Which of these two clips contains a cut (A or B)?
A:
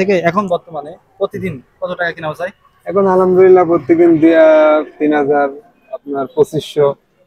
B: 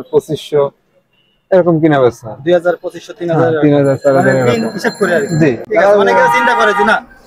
B